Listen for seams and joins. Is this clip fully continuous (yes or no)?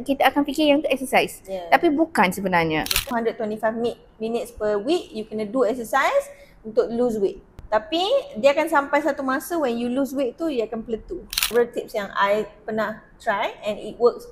no